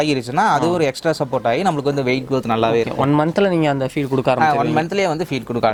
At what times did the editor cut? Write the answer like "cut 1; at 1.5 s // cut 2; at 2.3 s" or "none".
none